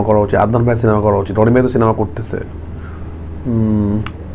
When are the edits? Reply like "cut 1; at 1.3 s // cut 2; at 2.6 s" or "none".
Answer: none